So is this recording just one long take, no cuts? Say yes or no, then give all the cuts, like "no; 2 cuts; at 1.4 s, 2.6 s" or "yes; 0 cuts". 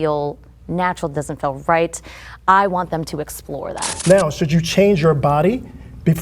no; 1 cut; at 3.8 s